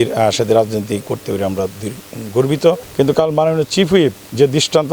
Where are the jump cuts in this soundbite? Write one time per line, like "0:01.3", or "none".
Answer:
0:02.8